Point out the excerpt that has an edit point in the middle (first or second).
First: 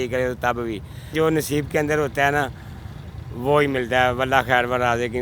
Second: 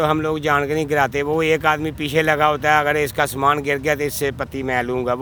first